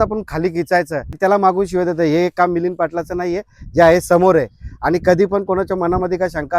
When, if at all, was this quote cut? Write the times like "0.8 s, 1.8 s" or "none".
1.2 s